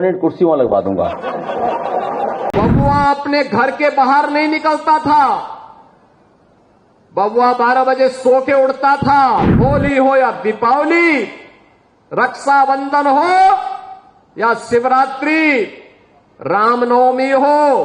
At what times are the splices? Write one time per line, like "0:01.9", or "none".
0:02.5
0:09.5

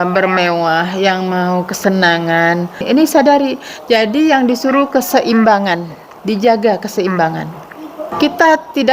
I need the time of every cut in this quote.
0:02.8
0:08.0

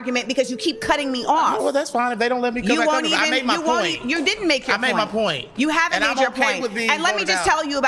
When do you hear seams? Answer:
0:01.0

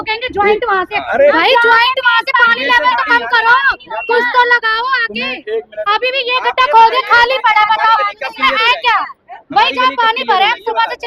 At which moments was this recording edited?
none

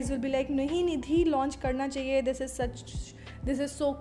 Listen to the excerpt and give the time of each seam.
none

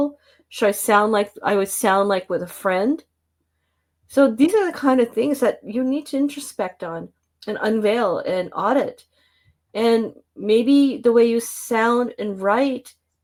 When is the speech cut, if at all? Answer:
none

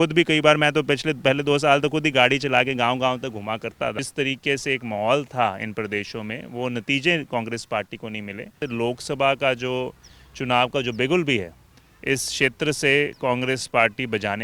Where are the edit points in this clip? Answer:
0:04.0
0:08.6

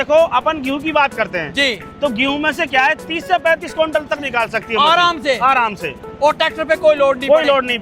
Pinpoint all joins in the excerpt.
none

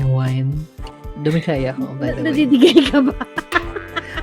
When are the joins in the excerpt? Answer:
0:01.2

